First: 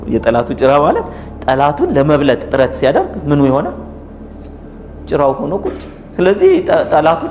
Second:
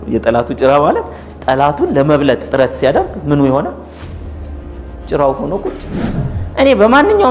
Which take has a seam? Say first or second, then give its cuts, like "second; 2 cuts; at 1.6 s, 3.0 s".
second; 1 cut; at 6.1 s